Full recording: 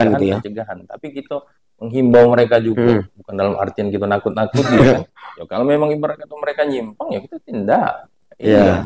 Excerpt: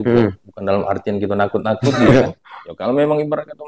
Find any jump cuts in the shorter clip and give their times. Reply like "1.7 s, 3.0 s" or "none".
none